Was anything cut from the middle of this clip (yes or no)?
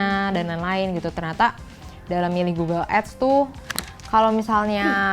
yes